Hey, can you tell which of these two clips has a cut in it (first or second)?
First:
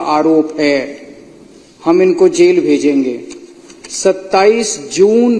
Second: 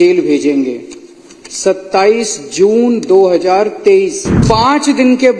second